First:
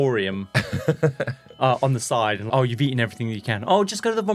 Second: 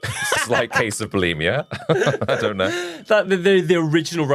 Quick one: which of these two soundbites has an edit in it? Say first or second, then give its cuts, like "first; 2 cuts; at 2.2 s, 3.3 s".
first; 1 cut; at 2.5 s